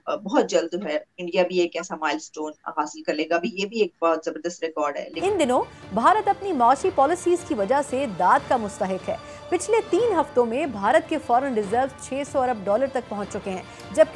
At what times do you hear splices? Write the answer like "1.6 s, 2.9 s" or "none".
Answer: 5.1 s